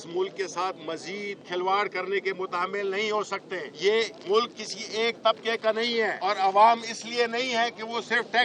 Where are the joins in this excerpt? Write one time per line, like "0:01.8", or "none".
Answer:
0:01.4
0:04.1
0:06.2